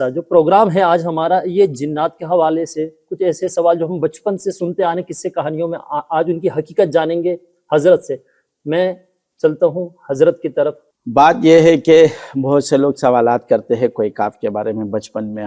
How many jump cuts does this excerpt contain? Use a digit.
1